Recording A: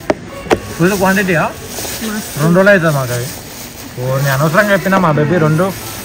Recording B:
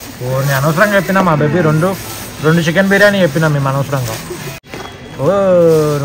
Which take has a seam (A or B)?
B